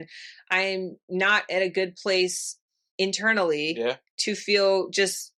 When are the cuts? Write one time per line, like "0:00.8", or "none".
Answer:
none